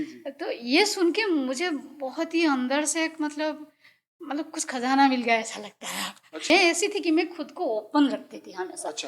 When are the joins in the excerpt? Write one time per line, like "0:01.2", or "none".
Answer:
0:06.5